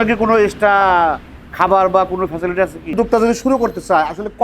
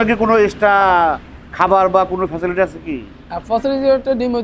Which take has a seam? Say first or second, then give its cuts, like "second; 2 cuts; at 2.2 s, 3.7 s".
first; 1 cut; at 2.8 s